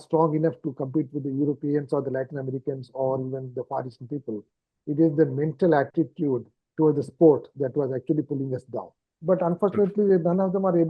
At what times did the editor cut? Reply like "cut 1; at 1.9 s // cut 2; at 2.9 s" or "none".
cut 1; at 9.1 s